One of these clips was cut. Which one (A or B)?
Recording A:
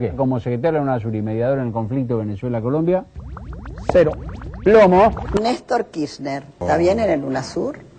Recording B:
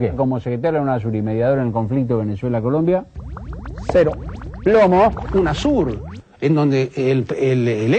A